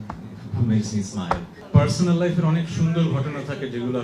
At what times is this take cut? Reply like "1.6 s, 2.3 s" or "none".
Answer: 1.5 s